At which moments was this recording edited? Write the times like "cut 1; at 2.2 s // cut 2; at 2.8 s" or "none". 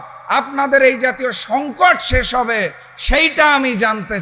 none